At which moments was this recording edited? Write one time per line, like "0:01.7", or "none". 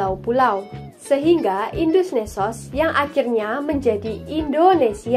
none